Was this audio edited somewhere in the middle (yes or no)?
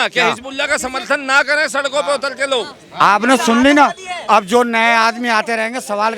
no